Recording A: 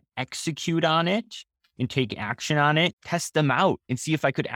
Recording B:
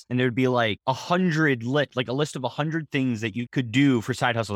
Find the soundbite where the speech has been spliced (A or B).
A